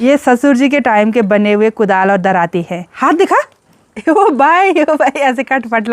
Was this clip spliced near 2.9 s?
yes; 1 cut; at 2.9 s

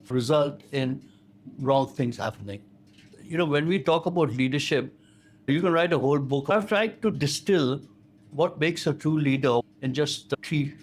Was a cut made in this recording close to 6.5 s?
yes; 3 cuts; at 3.1 s, 6.5 s, 9.6 s

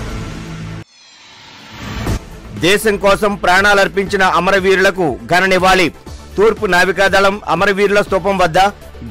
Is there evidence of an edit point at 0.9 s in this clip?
yes; 1 cut; at 0.9 s

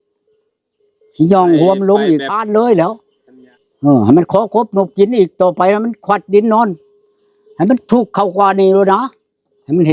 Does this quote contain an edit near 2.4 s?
yes; 1 cut; at 2.4 s

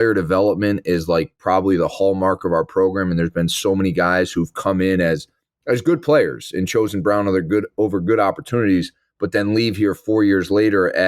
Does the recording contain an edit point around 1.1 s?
no; 0 cuts

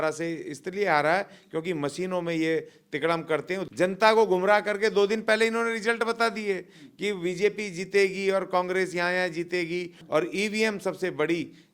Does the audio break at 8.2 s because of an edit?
no; 2 cuts; at 3.6 s, 10.0 s

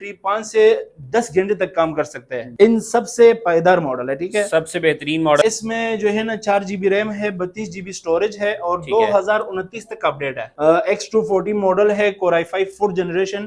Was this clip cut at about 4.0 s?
no; 3 cuts; at 2.4 s, 5.4 s, 10.5 s

